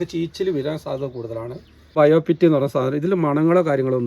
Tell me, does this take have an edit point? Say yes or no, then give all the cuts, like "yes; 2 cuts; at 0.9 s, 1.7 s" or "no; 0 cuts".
yes; 1 cut; at 1.9 s